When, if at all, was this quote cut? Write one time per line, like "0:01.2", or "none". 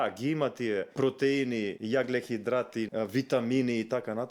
0:00.9
0:01.8
0:02.9